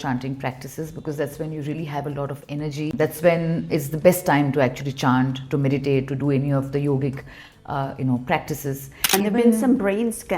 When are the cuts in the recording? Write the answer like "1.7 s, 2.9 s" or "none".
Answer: 2.9 s, 9.1 s